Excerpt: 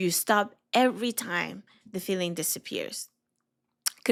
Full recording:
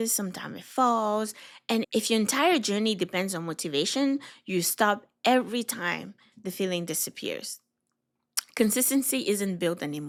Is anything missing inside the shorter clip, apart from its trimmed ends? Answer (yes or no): no